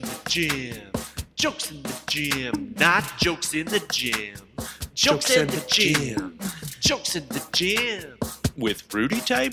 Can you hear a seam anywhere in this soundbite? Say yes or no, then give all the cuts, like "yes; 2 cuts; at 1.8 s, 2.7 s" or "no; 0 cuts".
no; 0 cuts